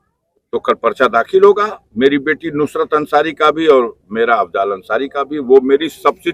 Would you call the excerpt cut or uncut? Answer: uncut